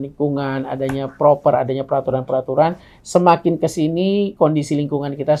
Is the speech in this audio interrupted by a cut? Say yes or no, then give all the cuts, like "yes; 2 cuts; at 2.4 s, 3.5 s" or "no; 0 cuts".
no; 0 cuts